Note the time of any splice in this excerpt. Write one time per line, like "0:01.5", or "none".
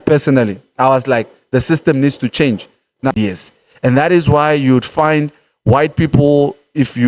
0:03.1